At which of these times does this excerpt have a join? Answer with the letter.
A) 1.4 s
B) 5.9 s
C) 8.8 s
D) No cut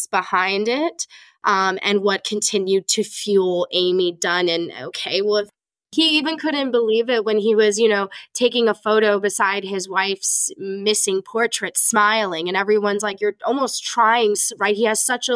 B